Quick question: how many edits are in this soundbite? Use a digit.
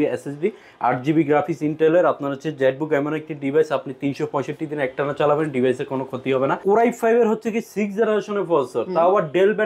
1